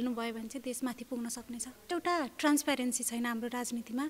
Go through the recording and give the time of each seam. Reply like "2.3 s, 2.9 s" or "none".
1.8 s